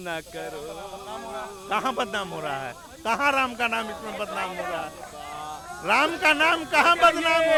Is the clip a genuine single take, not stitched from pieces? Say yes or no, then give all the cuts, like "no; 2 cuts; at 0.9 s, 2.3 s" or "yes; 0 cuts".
yes; 0 cuts